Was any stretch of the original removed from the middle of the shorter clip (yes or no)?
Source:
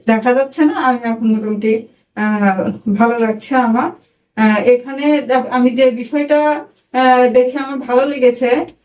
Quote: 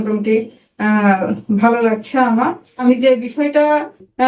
yes